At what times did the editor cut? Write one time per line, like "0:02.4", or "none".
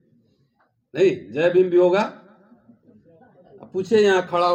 none